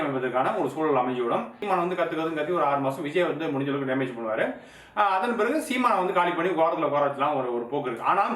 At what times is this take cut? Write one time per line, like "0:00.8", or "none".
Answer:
0:01.6